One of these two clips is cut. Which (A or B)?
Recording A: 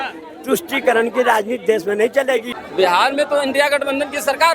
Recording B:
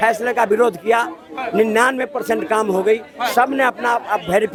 A